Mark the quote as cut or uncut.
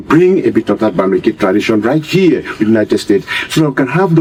uncut